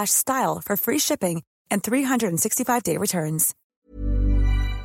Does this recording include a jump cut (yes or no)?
yes